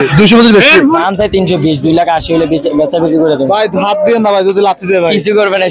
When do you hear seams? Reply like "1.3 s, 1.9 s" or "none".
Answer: 1.0 s

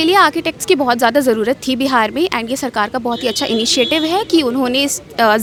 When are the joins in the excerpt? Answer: none

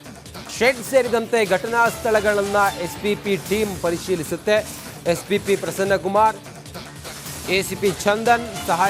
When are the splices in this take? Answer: 6.0 s

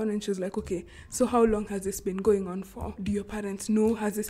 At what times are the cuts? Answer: 3.0 s

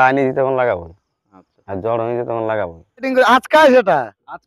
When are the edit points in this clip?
3.1 s

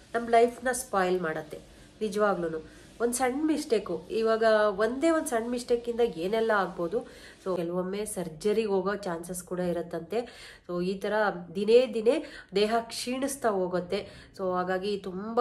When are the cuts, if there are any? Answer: 7.6 s

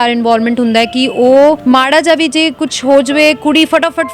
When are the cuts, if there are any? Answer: 1.6 s

